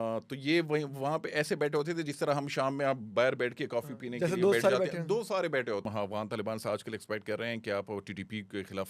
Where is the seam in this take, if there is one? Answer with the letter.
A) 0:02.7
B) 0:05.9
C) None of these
B